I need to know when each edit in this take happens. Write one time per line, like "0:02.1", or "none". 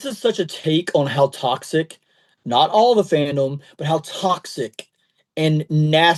none